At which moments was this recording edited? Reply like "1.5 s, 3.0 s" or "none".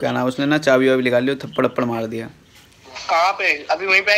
none